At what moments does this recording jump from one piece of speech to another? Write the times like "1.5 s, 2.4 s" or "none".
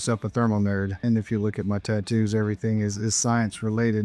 1.0 s